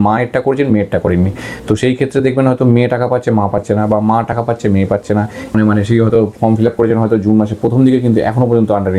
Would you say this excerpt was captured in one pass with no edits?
no; 1 cut; at 5.5 s

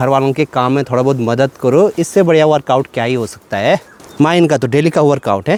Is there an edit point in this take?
no; 0 cuts

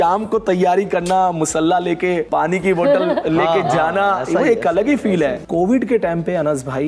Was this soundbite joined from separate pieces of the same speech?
yes; 2 cuts; at 2.2 s, 5.4 s

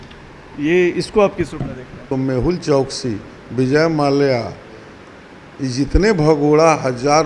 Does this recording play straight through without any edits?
no; 1 cut; at 1.9 s

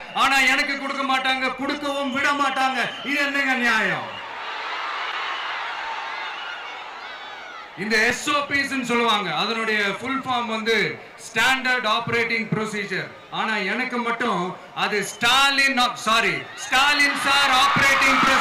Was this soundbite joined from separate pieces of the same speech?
no; 0 cuts

